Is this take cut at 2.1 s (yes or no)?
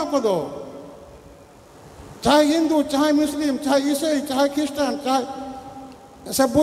yes